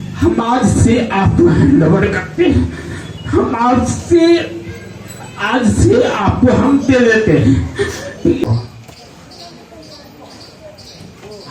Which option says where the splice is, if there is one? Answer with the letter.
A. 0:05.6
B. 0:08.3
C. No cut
B